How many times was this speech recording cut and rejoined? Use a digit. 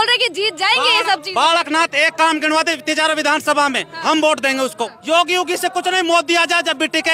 1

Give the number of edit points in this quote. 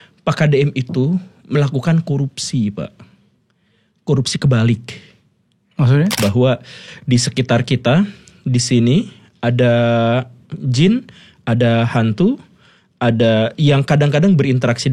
1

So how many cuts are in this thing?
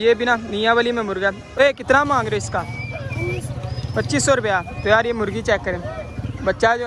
1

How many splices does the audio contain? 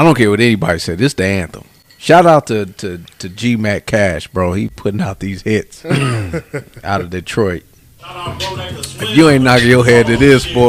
1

